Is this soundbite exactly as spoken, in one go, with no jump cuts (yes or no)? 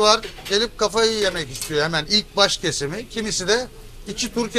yes